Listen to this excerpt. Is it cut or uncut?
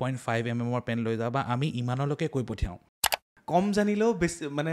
cut